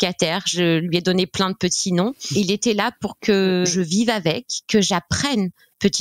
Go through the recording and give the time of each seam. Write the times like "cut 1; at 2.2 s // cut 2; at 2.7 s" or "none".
cut 1; at 2.2 s // cut 2; at 3.7 s